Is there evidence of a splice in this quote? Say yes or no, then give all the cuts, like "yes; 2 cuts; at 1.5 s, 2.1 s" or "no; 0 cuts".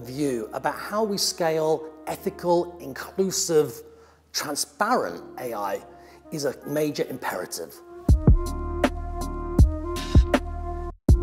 yes; 2 cuts; at 8.0 s, 10.0 s